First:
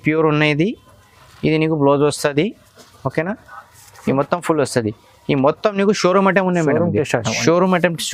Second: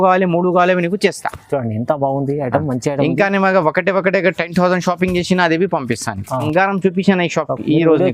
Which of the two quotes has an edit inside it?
second; 1 cut; at 6.5 s

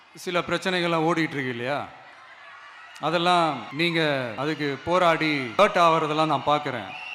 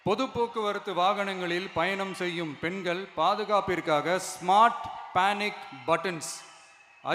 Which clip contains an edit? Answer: first; 3 cuts; at 3.7 s, 4.3 s, 5.6 s

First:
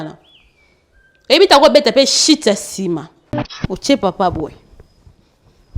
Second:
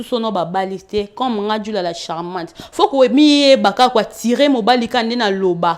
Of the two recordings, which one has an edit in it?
first; 1 cut; at 3.6 s

